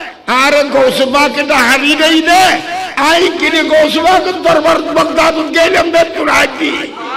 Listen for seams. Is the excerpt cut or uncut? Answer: uncut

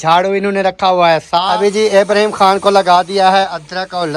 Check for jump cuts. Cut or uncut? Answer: cut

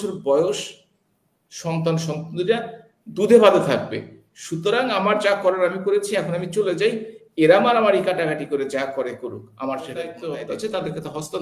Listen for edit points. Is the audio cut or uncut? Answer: cut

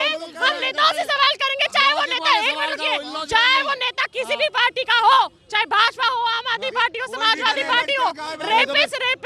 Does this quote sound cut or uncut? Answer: uncut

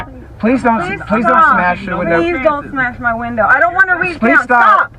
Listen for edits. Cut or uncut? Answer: uncut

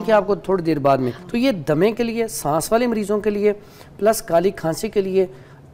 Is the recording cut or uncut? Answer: cut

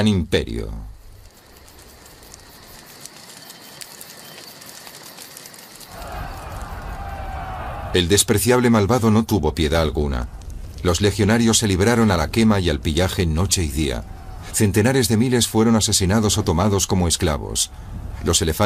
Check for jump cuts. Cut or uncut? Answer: uncut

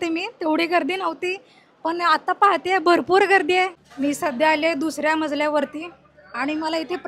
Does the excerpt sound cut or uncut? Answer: cut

